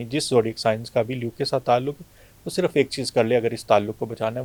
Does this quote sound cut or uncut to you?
uncut